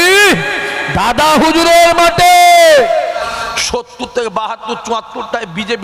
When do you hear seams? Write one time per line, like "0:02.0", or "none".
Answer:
0:03.2

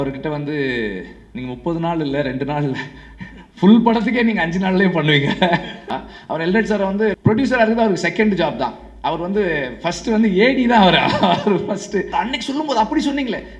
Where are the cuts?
0:05.9
0:07.2
0:12.1

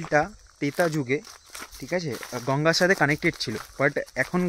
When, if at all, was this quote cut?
none

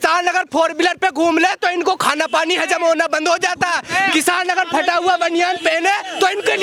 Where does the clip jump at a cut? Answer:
none

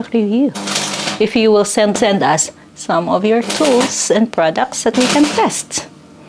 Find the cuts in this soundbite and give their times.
0:01.9

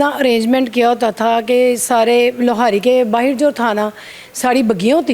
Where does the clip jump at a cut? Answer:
none

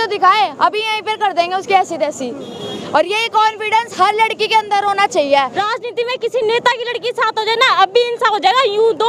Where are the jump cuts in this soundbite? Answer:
0:05.6

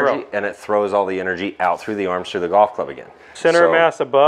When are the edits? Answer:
0:03.3

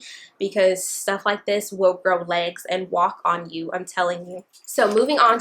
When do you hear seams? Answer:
none

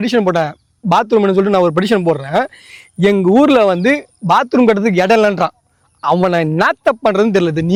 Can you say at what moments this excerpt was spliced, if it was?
none

